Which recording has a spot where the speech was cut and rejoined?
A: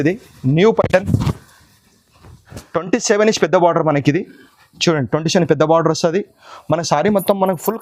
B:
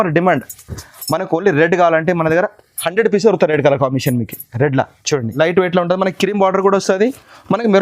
B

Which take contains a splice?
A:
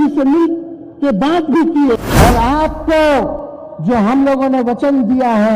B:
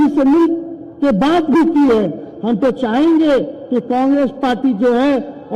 A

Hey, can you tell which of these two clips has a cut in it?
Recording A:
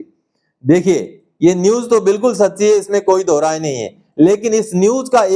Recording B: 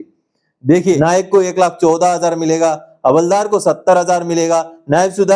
B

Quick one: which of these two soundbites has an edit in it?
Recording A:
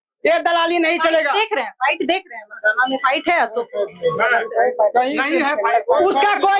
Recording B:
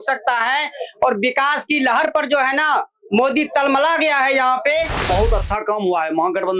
B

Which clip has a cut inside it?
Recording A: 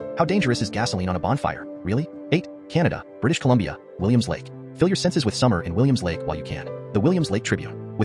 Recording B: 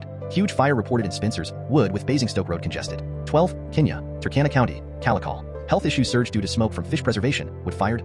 A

